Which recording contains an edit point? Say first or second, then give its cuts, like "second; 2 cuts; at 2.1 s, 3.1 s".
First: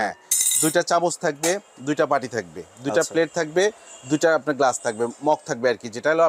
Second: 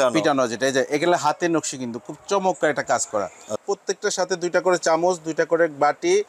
second; 1 cut; at 3.6 s